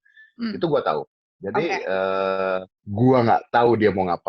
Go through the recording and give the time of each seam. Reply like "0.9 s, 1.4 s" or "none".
2.8 s